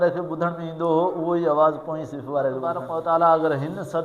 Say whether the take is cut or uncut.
cut